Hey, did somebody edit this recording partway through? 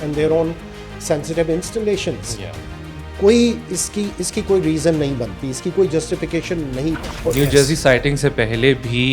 yes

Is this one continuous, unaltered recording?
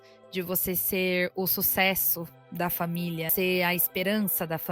no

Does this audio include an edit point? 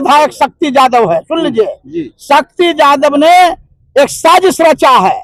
no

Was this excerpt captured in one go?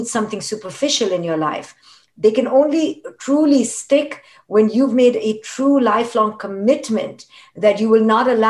yes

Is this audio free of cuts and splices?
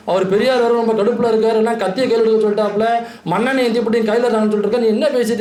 yes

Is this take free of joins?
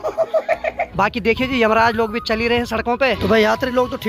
no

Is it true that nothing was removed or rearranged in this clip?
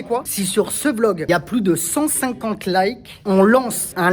no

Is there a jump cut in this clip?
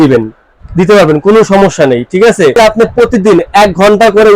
yes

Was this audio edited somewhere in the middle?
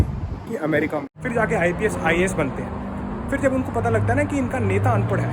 yes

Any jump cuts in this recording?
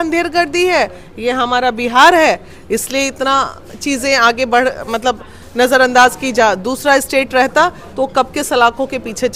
no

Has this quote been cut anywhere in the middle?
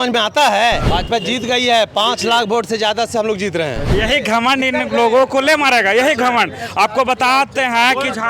yes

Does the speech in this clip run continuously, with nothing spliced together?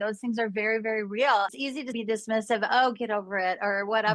no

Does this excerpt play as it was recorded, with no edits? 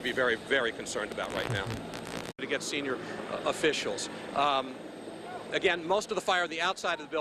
yes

